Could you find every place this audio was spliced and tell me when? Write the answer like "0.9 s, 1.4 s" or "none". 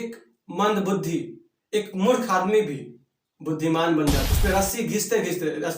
4.3 s